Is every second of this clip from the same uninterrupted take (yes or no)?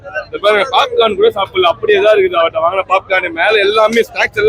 yes